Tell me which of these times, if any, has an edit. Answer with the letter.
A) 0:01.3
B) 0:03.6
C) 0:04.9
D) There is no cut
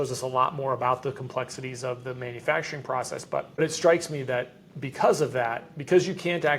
B